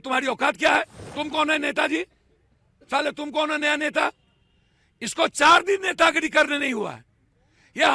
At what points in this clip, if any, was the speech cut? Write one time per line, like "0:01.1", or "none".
0:01.0